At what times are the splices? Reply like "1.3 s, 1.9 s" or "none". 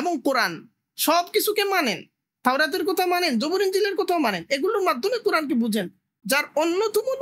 6.2 s